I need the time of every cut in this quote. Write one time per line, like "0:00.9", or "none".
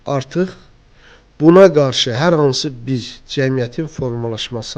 none